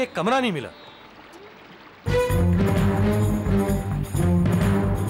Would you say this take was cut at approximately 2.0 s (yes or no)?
yes